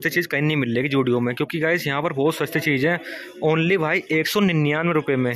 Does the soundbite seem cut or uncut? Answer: uncut